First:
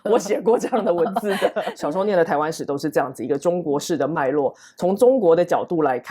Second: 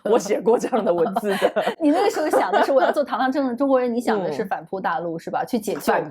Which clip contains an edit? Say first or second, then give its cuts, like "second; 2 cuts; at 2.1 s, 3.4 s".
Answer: first; 1 cut; at 1.7 s